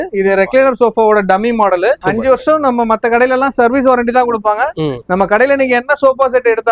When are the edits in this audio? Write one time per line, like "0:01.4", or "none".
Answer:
0:02.0